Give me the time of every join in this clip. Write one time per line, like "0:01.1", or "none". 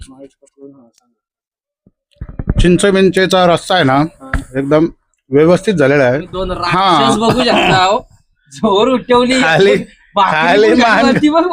0:06.6